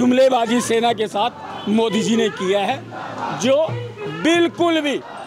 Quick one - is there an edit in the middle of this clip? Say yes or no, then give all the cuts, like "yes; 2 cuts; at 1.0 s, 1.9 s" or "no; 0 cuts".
no; 0 cuts